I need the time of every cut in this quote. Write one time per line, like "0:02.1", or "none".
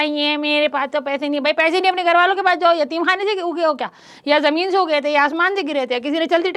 none